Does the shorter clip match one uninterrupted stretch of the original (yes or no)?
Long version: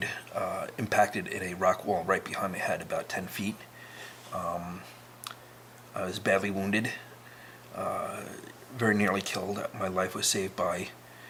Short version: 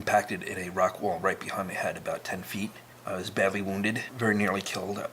no